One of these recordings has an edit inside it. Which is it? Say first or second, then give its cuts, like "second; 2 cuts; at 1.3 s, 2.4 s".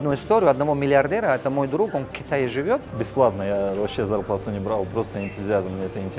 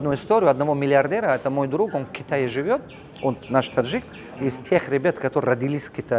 first; 1 cut; at 2.9 s